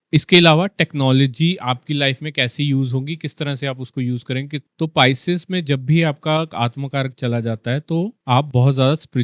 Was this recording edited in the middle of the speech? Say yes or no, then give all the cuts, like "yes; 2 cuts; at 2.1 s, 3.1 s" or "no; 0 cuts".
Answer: yes; 1 cut; at 4.6 s